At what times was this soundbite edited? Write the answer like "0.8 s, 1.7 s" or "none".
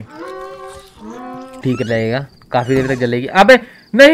1.6 s

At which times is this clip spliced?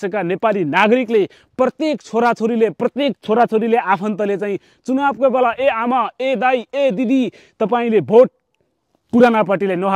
none

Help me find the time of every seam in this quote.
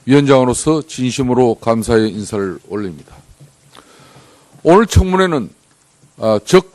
5.0 s

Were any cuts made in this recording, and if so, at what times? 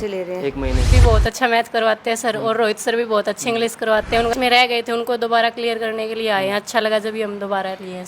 0.9 s, 4.3 s

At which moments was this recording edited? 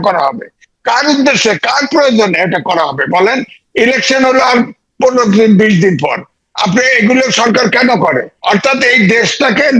8.3 s

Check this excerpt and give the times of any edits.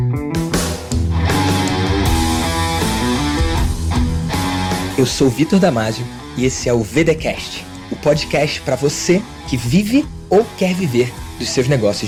none

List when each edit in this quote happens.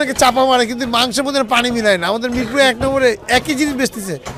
none

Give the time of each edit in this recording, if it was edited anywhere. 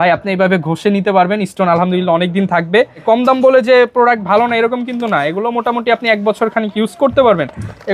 3.0 s

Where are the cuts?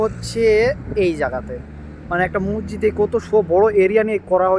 none

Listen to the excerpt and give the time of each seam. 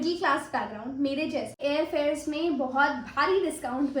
1.6 s

